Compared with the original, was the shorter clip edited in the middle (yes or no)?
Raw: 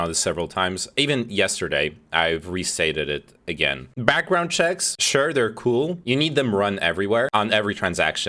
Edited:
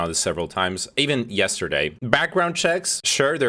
yes